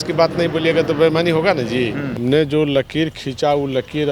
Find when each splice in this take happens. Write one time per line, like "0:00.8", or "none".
0:02.1